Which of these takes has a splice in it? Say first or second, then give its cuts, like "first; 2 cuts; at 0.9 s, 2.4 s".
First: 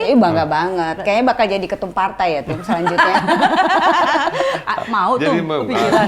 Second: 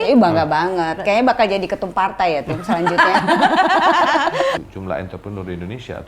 second; 1 cut; at 4.6 s